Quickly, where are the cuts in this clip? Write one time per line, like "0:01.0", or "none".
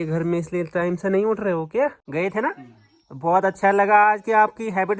0:02.0